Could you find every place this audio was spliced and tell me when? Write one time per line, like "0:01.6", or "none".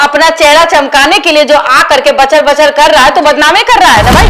none

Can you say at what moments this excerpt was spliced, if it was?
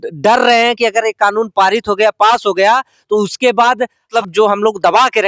0:04.1

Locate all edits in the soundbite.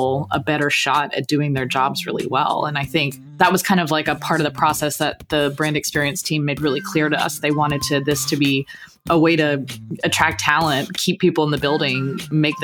0:03.2

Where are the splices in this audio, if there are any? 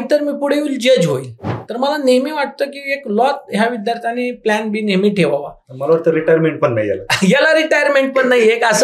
0:01.6

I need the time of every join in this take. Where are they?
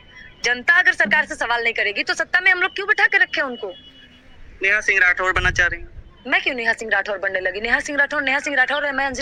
none

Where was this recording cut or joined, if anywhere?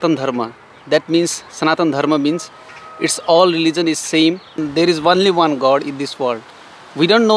0:04.6

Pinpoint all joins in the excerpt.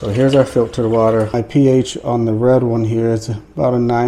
0:01.3

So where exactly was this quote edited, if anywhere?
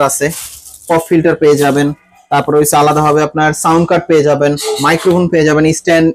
none

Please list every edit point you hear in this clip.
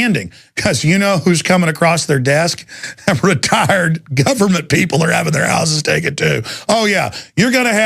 0:02.0

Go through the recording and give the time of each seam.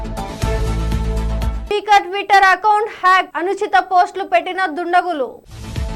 0:01.4

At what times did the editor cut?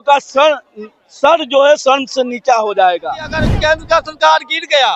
0:03.4

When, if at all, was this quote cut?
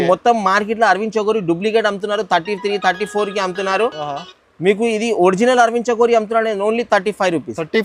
none

